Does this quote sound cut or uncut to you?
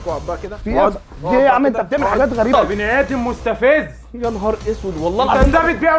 cut